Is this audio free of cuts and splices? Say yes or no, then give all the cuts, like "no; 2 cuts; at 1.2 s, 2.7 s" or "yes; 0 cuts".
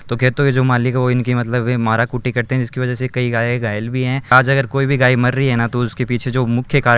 no; 1 cut; at 4.3 s